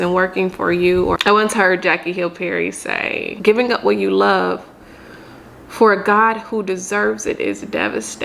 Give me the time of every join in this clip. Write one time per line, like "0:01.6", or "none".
0:01.2
0:03.3